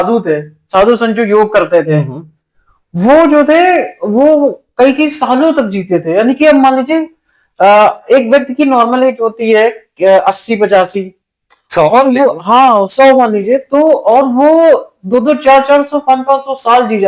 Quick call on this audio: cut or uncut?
uncut